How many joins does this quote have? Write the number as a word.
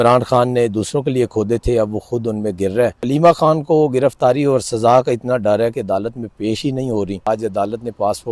two